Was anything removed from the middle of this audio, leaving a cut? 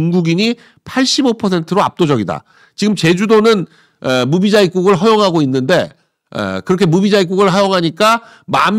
no; 0 cuts

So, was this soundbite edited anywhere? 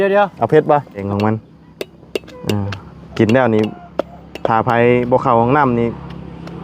yes; 1 cut; at 1.1 s

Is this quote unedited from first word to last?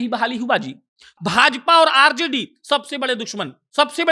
no; 1 cut; at 1.1 s

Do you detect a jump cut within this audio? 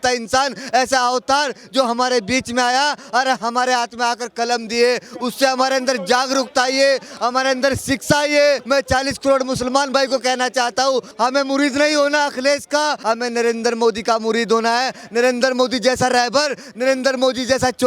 yes; 3 cuts; at 8.6 s, 11.1 s, 13.0 s

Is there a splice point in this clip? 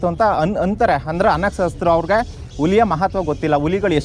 no; 0 cuts

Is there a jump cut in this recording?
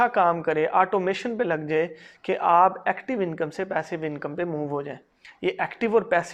no; 0 cuts

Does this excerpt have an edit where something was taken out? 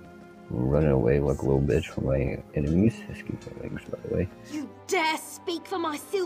yes; 1 cut; at 4.5 s

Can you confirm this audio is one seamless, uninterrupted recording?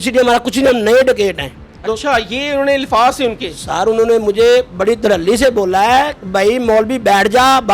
yes; 0 cuts

